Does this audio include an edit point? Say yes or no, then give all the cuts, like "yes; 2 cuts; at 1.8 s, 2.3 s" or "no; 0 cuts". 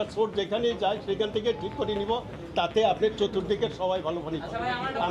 no; 0 cuts